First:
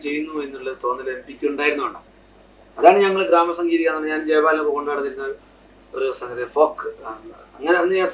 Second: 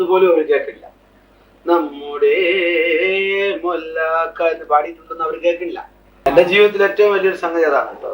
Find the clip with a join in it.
second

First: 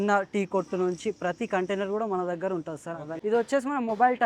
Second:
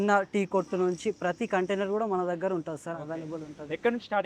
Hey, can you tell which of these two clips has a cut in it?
first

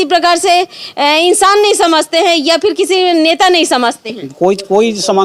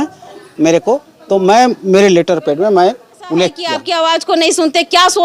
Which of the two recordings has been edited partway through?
second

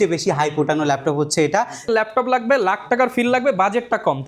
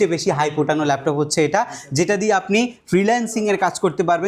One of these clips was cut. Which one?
first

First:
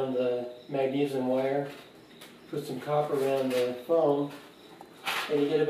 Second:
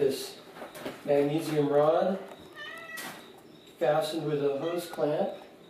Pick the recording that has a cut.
first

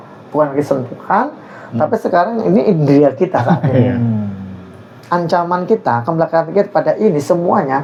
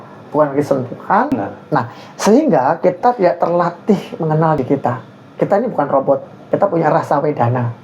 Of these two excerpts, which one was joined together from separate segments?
second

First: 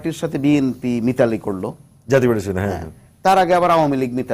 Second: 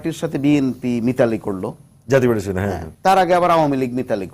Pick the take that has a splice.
second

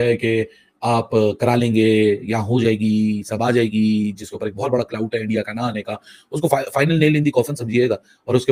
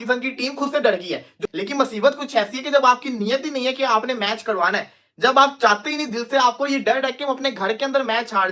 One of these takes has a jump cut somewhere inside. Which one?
second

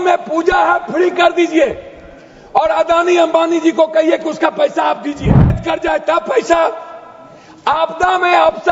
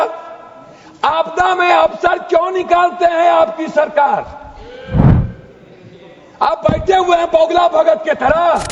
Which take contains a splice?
first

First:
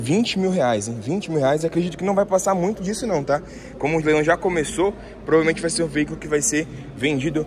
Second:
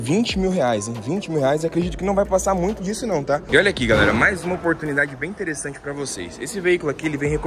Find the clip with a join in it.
second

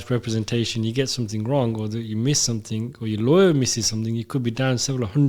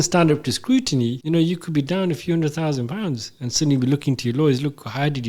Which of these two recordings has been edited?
second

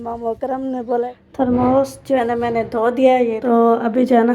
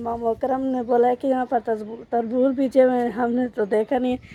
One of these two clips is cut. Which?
first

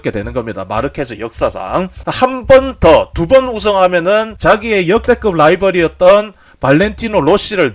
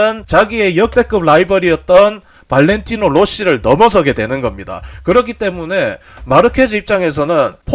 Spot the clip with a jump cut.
first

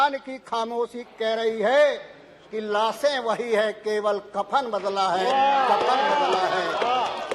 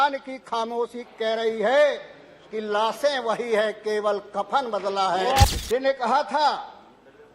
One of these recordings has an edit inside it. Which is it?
second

